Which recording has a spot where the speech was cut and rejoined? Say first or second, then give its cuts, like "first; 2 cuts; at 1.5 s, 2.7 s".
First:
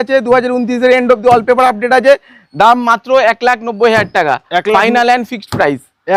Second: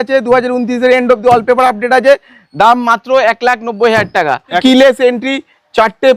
second; 1 cut; at 4.6 s